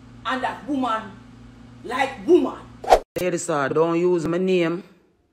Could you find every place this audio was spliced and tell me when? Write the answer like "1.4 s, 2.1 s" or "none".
3.2 s